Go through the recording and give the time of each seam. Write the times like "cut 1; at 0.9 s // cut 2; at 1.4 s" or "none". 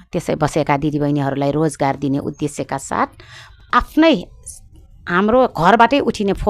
cut 1; at 3.5 s